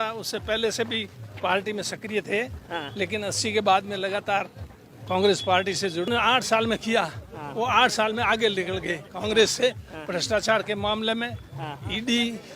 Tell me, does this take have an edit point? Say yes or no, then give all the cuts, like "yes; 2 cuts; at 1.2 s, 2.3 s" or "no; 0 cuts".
yes; 1 cut; at 6.1 s